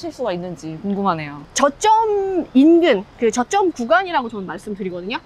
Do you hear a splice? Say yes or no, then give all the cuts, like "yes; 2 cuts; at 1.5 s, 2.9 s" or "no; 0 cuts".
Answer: yes; 1 cut; at 1.4 s